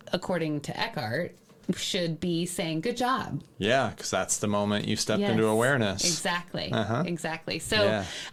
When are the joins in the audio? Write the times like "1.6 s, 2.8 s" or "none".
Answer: none